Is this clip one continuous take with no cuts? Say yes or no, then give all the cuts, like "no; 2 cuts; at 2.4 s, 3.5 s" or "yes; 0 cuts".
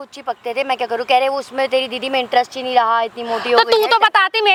yes; 0 cuts